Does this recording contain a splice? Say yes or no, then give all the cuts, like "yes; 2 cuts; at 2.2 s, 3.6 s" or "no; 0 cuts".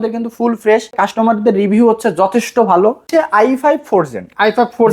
yes; 2 cuts; at 1.0 s, 3.1 s